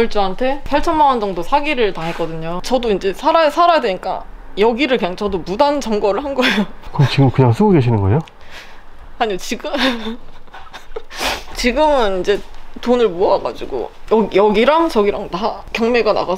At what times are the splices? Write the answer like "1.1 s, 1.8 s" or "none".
2.5 s